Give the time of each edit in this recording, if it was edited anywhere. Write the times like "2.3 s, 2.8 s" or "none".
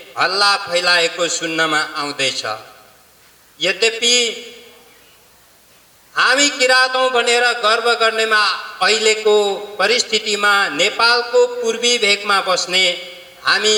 none